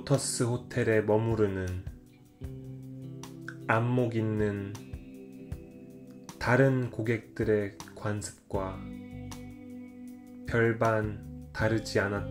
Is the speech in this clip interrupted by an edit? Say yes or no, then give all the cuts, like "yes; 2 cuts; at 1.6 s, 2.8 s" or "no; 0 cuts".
yes; 2 cuts; at 8.8 s, 10.3 s